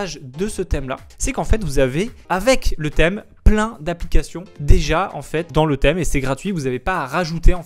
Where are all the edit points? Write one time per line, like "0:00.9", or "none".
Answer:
0:02.2